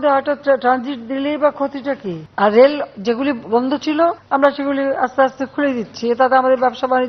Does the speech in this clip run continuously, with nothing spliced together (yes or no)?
no